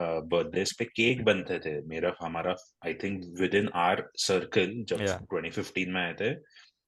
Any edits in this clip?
no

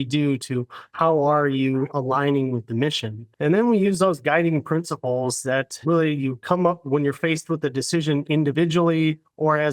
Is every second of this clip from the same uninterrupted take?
no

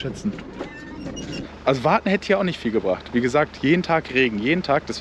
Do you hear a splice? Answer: yes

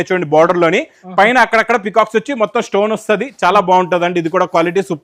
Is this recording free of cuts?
yes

